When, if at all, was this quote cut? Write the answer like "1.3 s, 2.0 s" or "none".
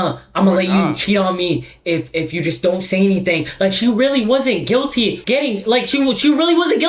5.2 s